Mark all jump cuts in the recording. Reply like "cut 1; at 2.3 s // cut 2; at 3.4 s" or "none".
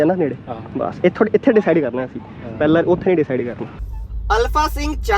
cut 1; at 3.8 s